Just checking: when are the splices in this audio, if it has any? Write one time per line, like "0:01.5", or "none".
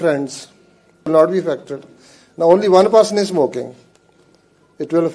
0:01.1